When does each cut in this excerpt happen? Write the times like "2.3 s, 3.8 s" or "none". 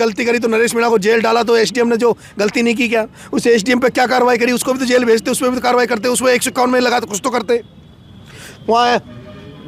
none